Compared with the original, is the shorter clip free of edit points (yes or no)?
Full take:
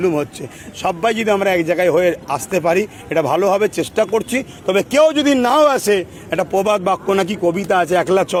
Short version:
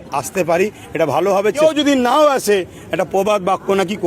no